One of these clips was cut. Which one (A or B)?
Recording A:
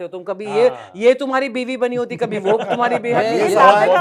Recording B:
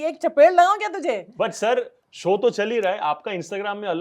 B